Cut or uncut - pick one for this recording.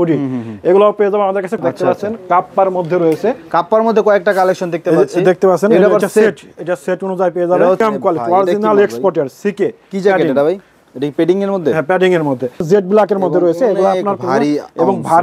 cut